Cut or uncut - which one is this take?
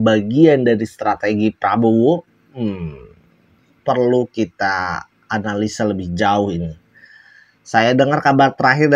uncut